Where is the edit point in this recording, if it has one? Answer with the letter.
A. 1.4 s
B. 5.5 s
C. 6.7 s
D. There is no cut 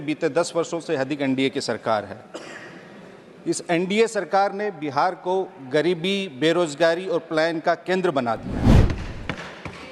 D